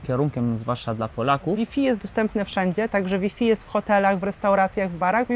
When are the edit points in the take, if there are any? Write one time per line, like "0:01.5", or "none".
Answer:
0:01.6